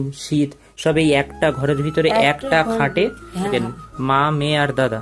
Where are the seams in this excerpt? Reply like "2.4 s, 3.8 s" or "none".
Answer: none